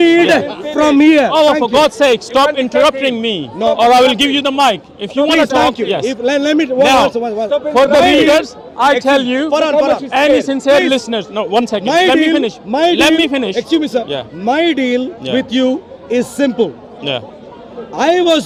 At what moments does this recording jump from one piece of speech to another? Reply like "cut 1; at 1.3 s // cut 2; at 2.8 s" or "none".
none